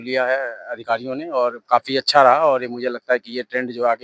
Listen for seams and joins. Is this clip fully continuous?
yes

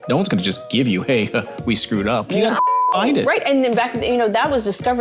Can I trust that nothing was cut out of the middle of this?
yes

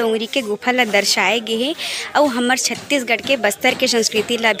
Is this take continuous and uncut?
yes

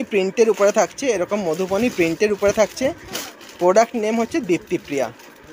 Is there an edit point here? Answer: no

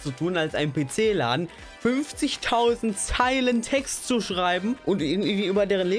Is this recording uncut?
no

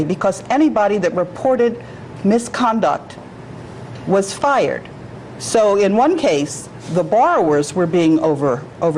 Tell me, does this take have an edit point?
yes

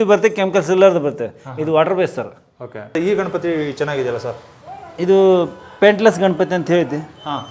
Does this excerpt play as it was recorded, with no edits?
no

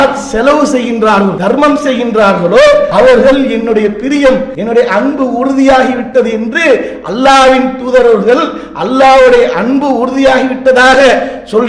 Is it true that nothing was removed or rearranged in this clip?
no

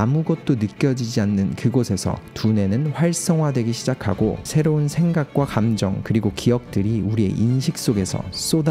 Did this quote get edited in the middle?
no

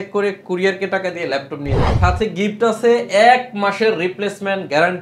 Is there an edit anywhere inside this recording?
yes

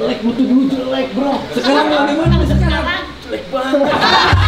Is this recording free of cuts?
yes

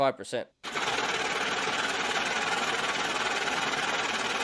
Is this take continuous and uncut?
yes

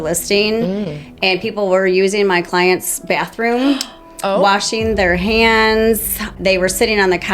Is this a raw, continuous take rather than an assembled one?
no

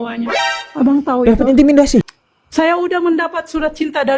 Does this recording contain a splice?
yes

